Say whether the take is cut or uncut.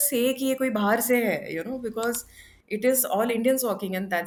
uncut